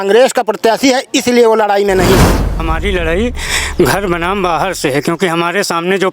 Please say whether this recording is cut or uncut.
cut